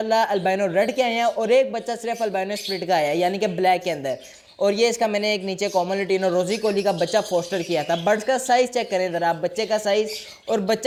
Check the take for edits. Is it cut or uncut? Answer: uncut